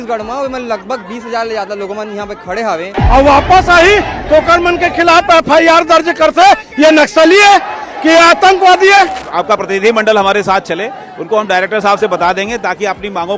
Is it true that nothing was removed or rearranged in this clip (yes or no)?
no